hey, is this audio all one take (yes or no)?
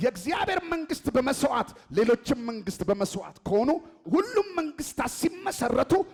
yes